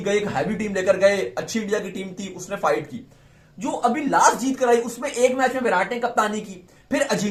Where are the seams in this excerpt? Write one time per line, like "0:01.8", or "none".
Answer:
none